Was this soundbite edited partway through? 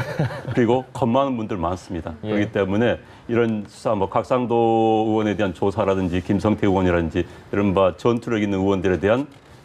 no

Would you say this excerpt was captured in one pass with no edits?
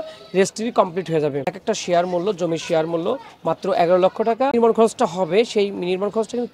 no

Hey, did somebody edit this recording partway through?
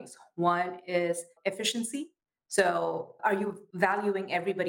yes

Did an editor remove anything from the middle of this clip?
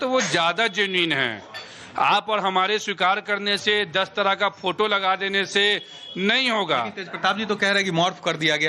yes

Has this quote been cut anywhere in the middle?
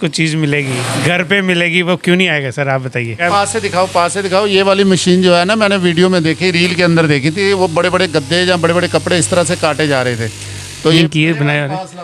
yes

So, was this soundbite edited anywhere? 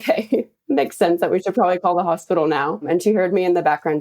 yes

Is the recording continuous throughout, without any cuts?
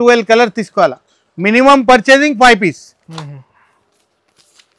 yes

